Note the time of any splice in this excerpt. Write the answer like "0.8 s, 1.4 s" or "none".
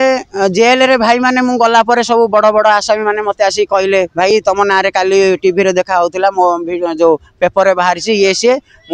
none